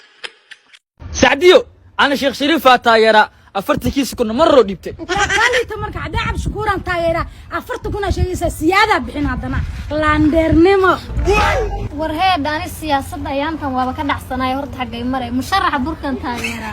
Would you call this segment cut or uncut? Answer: cut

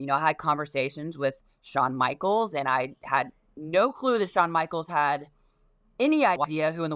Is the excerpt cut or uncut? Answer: uncut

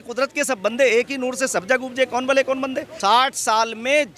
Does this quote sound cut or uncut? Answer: cut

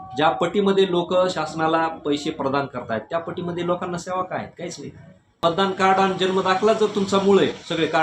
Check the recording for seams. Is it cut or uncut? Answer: cut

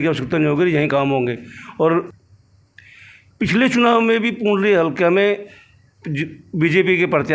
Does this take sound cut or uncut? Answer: cut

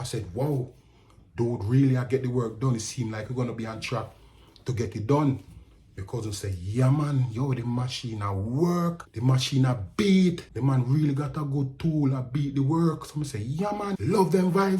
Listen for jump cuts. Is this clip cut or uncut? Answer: cut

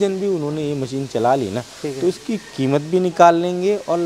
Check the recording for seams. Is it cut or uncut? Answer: uncut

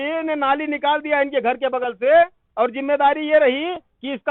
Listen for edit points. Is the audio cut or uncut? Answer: uncut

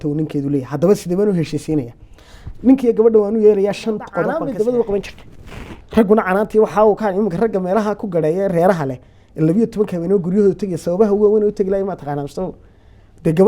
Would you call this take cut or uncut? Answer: cut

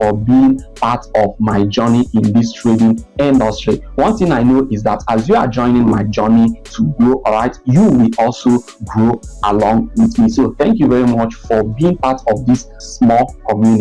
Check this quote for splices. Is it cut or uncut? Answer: cut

